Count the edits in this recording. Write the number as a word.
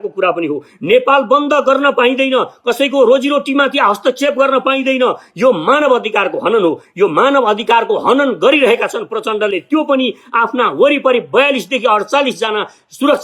zero